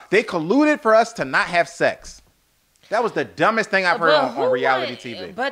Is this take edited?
no; 0 cuts

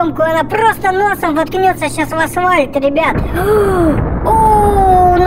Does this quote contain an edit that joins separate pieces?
no; 0 cuts

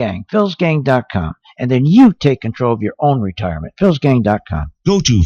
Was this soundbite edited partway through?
no; 0 cuts

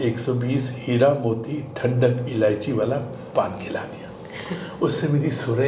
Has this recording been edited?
no; 0 cuts

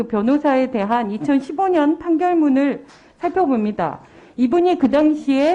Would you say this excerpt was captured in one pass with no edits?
yes; 0 cuts

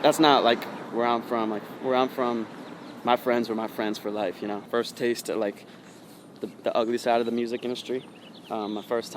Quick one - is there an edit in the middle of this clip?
yes; 1 cut; at 4.6 s

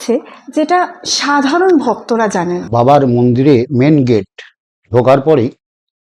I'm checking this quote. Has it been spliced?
no; 0 cuts

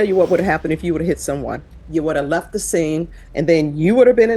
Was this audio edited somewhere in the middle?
yes; 2 cuts; at 1.7 s, 3.2 s

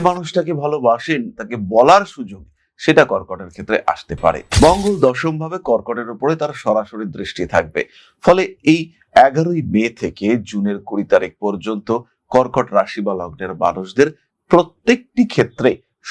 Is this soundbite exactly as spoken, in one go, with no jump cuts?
yes; 0 cuts

